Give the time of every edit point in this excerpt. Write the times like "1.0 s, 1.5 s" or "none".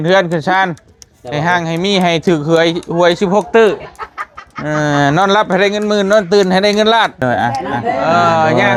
none